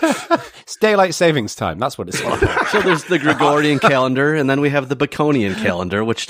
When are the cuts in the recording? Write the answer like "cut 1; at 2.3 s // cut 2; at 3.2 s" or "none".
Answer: cut 1; at 2.8 s